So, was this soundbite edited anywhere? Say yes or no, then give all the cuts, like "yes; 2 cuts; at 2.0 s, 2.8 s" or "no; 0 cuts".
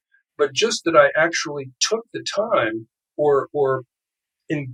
no; 0 cuts